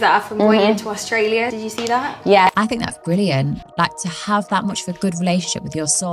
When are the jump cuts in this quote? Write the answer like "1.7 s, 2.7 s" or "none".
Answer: 2.5 s